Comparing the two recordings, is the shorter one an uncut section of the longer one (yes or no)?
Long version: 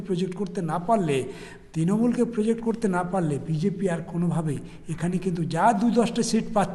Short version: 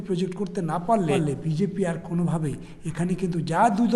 no